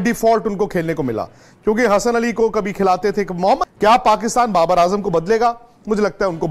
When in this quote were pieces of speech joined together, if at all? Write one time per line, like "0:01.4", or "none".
0:03.7